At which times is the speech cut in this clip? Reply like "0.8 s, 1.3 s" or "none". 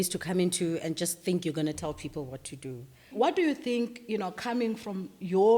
3.1 s